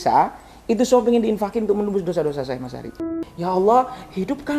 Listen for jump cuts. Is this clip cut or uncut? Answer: cut